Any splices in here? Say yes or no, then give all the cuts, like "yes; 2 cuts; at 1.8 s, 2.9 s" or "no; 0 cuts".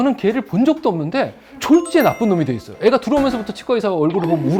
no; 0 cuts